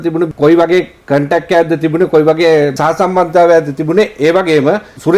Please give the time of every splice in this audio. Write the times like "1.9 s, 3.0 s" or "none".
2.8 s